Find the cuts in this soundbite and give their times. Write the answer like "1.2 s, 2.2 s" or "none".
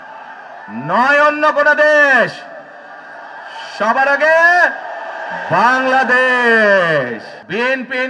7.0 s